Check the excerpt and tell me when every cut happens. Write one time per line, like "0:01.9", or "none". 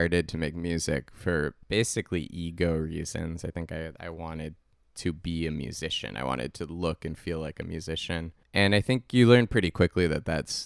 0:01.6
0:08.4